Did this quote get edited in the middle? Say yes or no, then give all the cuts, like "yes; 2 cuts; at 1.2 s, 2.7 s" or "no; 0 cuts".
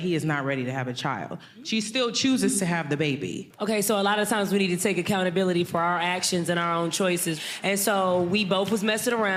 no; 0 cuts